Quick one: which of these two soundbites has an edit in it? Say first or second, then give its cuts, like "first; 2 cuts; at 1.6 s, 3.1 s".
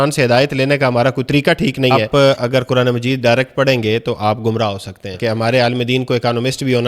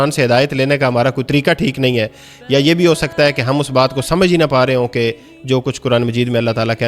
first; 2 cuts; at 2.0 s, 5.2 s